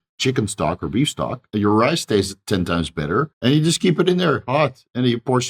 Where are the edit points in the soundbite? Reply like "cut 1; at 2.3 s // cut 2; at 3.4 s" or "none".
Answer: cut 1; at 1.5 s // cut 2; at 3.3 s